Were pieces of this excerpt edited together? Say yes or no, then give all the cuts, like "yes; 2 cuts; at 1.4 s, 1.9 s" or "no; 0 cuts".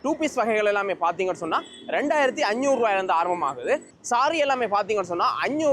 no; 0 cuts